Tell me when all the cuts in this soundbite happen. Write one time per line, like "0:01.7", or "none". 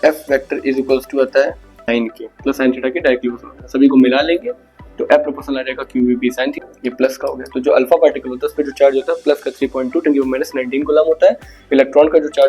0:01.8
0:06.5